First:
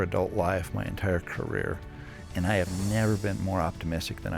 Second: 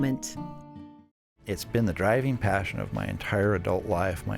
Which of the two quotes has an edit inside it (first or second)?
second